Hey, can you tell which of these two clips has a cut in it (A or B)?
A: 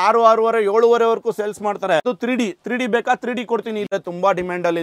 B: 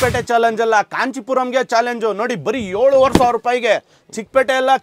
A